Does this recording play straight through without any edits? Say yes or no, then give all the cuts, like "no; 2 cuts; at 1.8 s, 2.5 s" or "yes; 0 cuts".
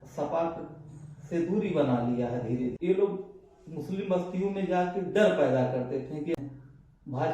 no; 2 cuts; at 2.7 s, 6.3 s